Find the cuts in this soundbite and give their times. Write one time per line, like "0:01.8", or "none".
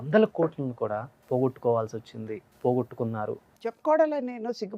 0:01.1
0:02.5
0:03.4